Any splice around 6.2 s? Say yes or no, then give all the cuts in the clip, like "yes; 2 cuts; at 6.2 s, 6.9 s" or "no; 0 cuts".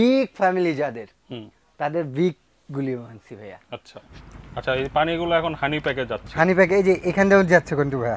no; 1 cut; at 4.1 s